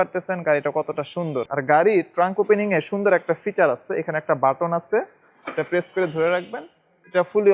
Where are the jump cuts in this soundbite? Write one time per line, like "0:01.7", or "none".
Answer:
0:01.5